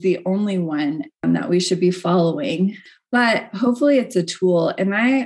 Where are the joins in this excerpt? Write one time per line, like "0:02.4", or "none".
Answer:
0:01.2